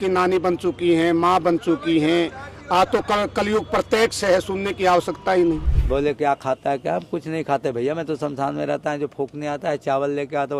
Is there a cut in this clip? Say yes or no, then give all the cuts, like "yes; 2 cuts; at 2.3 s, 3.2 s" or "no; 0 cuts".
yes; 1 cut; at 5.7 s